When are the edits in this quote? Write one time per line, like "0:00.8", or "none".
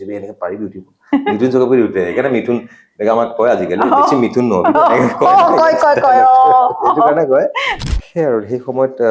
0:07.7